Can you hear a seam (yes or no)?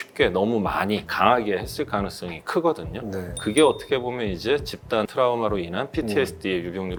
no